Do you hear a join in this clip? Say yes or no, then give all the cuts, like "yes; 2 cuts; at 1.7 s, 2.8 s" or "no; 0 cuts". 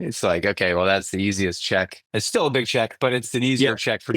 yes; 3 cuts; at 1.1 s, 2.0 s, 3.3 s